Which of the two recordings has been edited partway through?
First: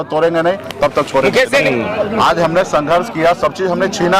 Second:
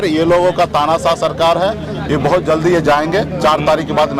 first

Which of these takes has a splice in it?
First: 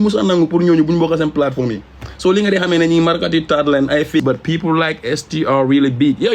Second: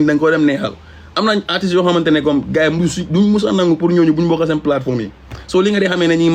first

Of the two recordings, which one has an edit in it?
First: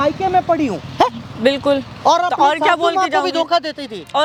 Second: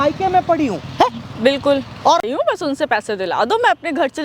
second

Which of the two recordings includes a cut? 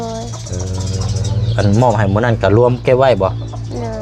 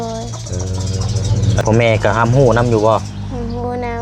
second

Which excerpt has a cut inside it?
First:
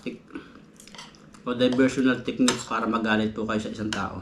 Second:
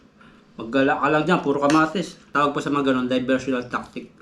second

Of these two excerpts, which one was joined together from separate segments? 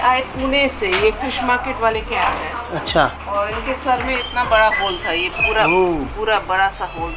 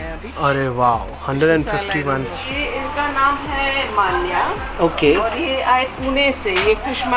second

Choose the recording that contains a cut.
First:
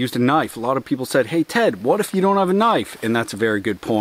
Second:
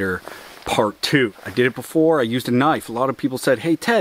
second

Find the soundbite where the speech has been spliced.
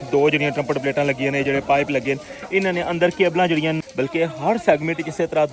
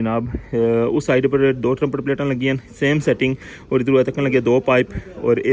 first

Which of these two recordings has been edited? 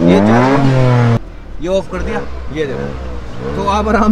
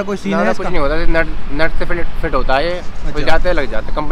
first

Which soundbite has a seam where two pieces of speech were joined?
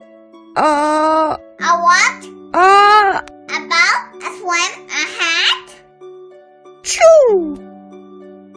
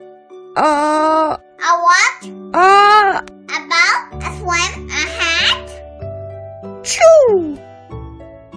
second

